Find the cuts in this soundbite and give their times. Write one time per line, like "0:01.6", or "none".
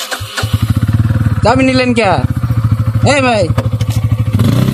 none